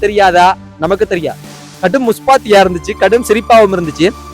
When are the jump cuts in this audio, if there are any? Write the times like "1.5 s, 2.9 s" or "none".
1.6 s